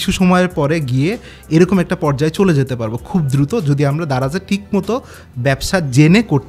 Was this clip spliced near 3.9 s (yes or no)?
no